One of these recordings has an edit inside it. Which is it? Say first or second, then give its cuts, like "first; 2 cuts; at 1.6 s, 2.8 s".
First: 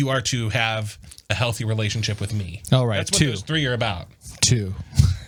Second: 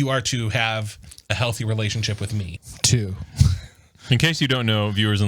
second; 1 cut; at 2.5 s